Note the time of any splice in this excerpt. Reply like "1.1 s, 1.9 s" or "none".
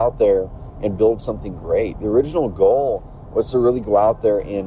none